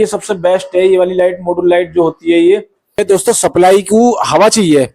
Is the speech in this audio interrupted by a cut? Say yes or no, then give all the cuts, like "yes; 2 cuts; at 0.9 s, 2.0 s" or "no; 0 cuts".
yes; 1 cut; at 3.0 s